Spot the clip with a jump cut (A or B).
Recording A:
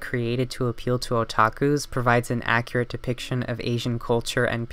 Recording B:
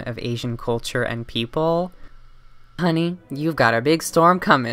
B